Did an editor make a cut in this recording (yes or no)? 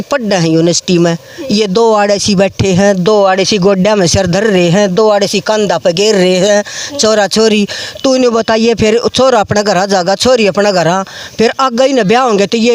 no